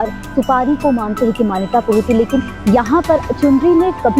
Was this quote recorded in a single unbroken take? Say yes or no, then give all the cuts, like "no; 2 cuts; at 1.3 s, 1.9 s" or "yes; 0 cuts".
no; 1 cut; at 3.3 s